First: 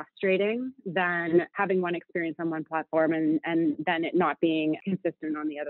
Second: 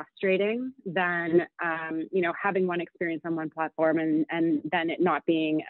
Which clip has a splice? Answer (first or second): first